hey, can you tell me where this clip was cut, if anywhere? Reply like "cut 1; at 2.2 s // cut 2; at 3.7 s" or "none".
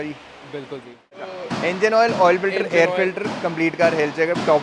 none